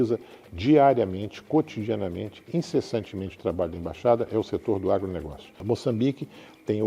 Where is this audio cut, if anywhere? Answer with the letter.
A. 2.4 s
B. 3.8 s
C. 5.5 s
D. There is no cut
C